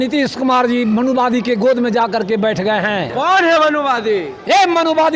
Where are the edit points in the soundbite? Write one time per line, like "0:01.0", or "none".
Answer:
0:03.1